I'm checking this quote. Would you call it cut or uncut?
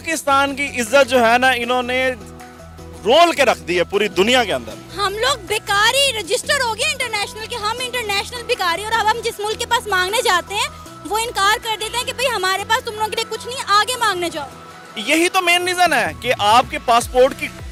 uncut